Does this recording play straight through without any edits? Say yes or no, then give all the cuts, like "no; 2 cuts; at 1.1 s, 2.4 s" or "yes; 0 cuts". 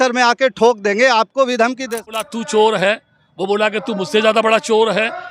no; 1 cut; at 2.3 s